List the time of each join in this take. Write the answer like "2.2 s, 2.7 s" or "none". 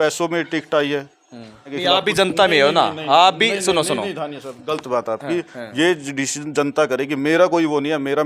1.7 s